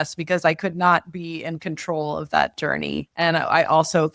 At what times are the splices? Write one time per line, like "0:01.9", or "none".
0:03.1

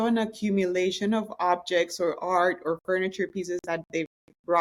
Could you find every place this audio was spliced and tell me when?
none

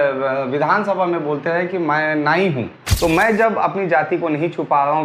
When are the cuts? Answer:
0:02.8

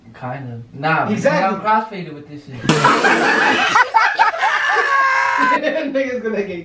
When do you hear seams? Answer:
none

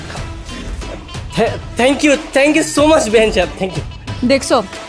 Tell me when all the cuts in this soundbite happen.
none

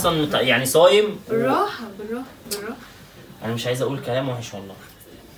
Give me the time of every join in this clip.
none

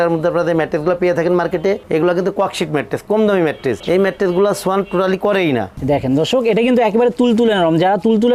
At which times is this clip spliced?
0:05.7

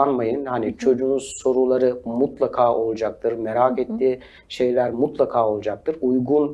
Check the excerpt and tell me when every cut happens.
none

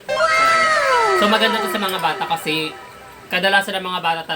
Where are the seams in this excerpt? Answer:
0:01.2

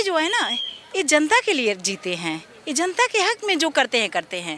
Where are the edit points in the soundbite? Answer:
none

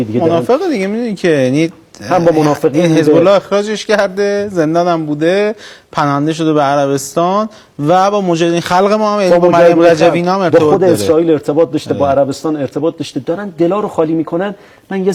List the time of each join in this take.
none

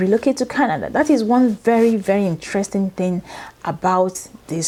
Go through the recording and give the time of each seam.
none

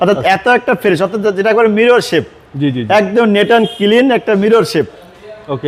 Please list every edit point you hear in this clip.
none

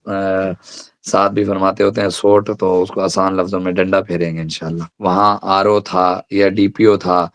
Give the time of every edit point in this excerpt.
0:04.8

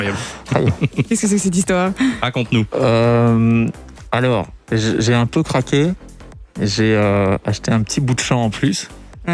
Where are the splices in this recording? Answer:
none

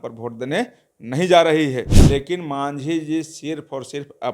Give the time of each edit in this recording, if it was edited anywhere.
0:02.0

